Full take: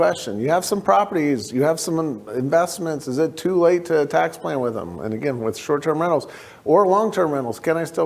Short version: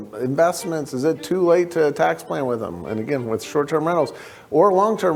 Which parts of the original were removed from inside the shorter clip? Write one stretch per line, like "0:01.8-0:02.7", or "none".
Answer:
none

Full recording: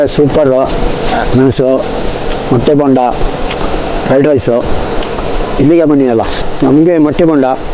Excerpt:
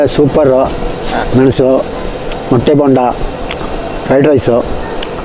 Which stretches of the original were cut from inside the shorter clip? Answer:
none

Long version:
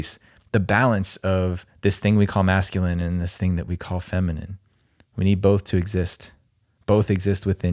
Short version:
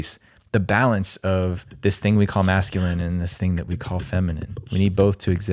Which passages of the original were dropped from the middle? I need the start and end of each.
0:04.5-0:05.0

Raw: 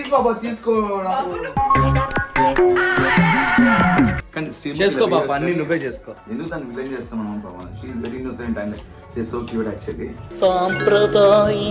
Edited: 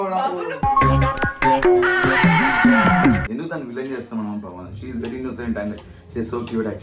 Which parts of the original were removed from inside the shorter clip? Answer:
0:04.2-0:06.3

